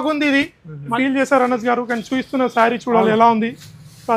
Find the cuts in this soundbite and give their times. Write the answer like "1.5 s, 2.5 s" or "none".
0.9 s